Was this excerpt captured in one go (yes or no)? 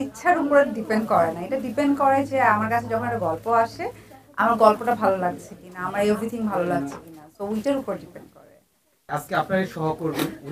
no